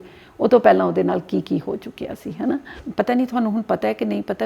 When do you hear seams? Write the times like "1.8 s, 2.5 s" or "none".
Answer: 2.7 s